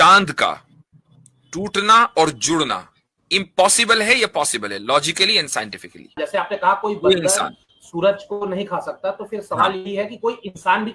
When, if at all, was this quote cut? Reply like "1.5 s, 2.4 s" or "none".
6.2 s